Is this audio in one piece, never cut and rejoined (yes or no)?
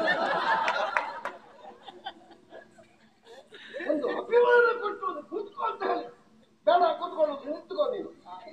yes